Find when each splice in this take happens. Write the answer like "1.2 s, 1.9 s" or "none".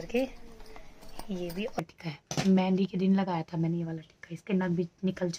1.7 s